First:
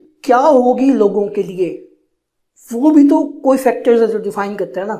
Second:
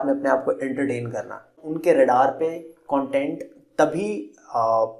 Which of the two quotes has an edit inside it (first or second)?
second